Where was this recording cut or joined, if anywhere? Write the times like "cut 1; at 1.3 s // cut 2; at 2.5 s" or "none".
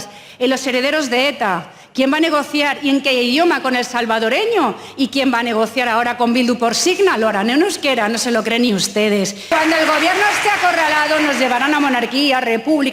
cut 1; at 9.5 s